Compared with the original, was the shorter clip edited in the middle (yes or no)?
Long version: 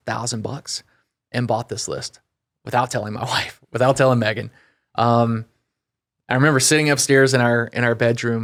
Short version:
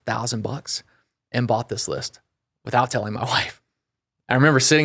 yes